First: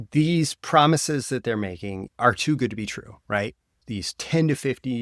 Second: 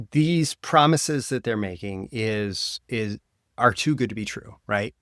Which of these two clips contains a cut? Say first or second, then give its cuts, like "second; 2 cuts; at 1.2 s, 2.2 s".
first; 2 cuts; at 2.0 s, 3.8 s